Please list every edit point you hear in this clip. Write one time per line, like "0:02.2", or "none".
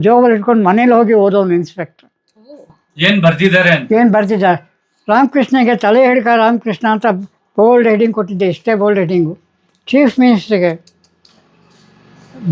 none